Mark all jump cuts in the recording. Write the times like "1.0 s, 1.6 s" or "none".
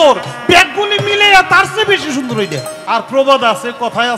2.7 s